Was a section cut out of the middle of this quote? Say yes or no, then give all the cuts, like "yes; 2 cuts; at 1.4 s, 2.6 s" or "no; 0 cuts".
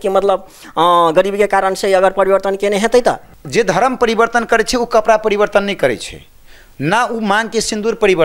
yes; 1 cut; at 3.3 s